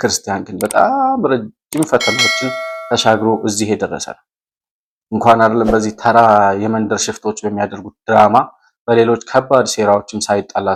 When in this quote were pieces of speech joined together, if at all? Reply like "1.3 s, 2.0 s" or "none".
none